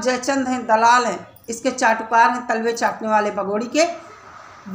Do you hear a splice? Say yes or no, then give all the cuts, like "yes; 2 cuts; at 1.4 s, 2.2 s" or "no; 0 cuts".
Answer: no; 0 cuts